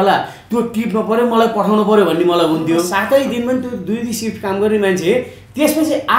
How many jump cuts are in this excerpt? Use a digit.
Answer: 1